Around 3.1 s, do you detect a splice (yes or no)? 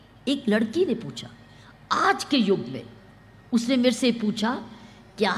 no